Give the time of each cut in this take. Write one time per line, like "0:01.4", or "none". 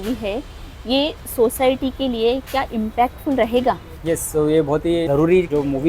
0:03.9
0:05.1